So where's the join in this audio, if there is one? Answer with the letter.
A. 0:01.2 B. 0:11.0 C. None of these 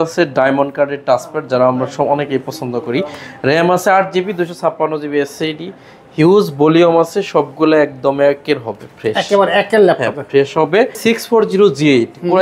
B